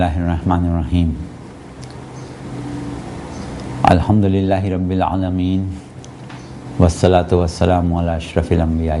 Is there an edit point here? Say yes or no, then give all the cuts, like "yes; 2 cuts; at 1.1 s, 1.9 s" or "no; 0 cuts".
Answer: yes; 1 cut; at 7.9 s